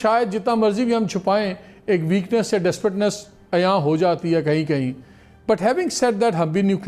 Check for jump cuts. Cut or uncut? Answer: uncut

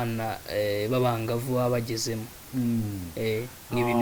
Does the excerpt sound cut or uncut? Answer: uncut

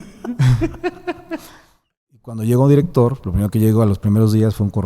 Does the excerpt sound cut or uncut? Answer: cut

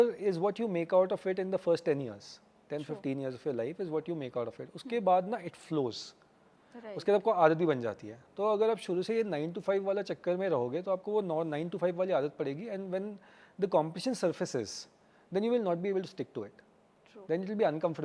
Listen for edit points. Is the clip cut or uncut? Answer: uncut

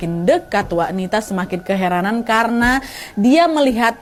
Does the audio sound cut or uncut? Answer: uncut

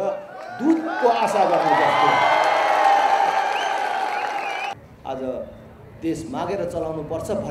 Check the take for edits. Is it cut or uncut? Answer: cut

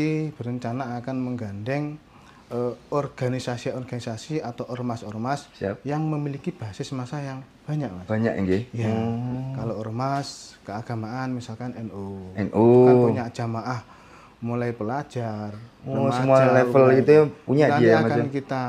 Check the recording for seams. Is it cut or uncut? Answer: uncut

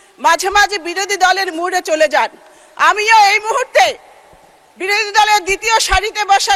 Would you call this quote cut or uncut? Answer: uncut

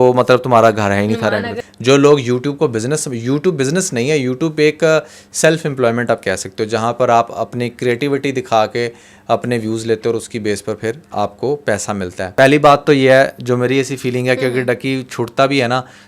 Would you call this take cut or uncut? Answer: cut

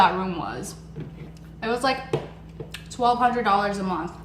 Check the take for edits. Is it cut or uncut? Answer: uncut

